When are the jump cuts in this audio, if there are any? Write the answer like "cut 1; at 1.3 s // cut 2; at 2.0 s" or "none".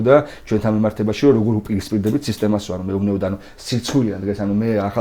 none